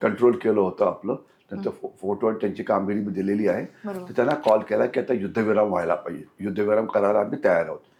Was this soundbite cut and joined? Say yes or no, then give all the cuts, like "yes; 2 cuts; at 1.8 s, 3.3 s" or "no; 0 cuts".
no; 0 cuts